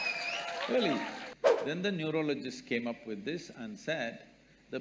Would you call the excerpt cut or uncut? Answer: cut